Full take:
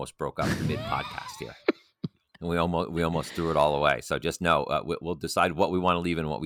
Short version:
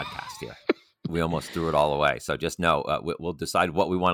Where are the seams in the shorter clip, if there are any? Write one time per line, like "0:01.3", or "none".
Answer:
0:01.1